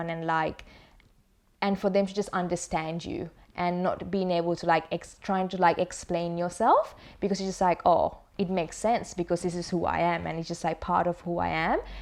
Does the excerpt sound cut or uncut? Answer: uncut